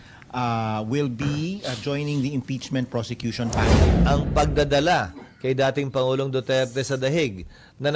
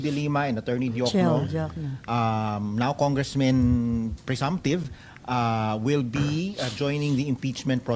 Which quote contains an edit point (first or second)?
first